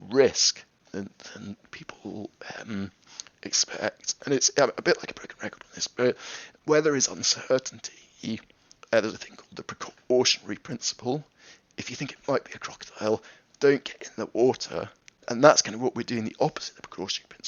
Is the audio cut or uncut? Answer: cut